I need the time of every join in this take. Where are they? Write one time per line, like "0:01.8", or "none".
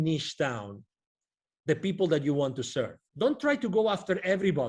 0:03.0